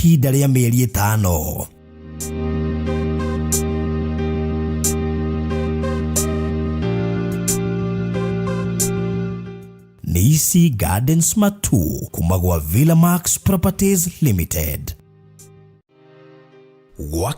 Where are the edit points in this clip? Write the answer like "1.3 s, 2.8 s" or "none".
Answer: 15.9 s